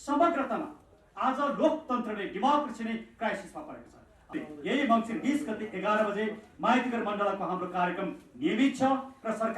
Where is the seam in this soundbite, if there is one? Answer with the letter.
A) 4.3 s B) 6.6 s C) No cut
A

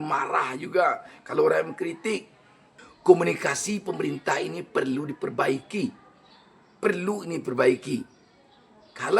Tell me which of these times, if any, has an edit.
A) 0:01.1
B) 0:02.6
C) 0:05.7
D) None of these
B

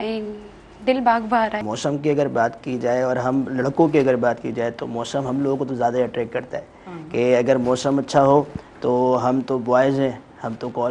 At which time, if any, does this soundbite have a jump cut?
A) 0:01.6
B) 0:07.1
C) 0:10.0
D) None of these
A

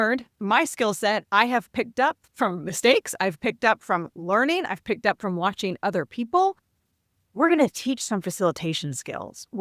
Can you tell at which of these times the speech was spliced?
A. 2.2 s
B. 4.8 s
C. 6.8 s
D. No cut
A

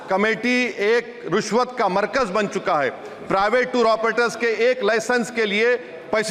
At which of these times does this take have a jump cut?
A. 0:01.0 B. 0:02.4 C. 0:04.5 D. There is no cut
D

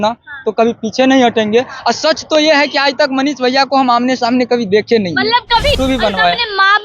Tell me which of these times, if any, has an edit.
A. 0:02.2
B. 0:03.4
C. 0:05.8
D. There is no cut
C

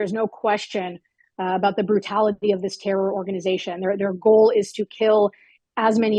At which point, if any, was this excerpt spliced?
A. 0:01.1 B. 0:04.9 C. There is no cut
C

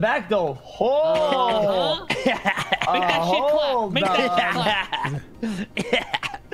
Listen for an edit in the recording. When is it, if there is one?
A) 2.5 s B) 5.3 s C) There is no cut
C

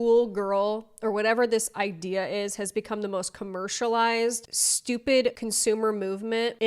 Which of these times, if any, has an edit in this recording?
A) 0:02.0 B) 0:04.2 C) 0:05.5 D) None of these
C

